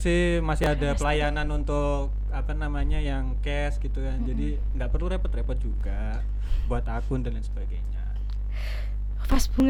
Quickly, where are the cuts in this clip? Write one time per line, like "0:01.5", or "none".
none